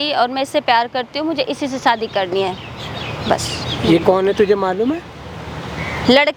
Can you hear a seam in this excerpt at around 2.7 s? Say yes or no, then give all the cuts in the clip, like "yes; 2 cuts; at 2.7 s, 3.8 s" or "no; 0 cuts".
no; 0 cuts